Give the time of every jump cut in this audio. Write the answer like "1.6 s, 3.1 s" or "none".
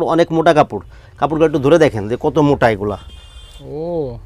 none